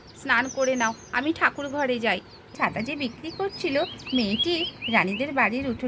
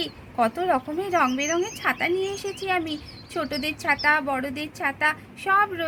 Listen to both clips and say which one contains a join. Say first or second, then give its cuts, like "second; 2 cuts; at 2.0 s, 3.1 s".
first; 1 cut; at 2.4 s